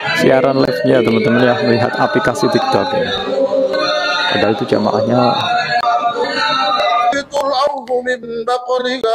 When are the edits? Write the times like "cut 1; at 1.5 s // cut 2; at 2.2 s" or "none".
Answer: none